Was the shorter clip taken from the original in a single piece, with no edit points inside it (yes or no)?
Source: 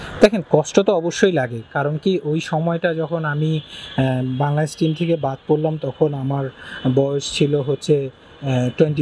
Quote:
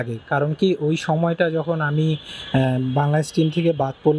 yes